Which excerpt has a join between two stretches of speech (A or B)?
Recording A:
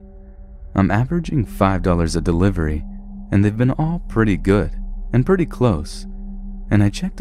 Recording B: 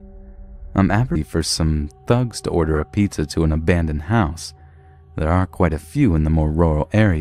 A